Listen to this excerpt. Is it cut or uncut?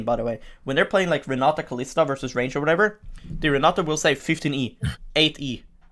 cut